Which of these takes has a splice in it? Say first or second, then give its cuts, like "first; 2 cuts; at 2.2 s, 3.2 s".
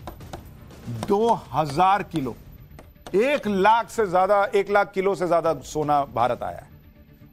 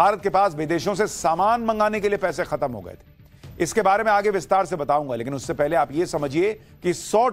second; 1 cut; at 1.0 s